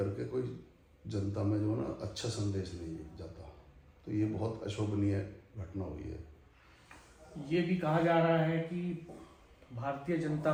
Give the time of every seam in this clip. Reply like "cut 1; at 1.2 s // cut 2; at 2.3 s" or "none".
none